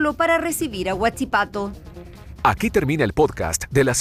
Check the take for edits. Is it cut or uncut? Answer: uncut